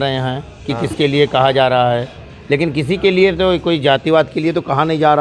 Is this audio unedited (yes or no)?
yes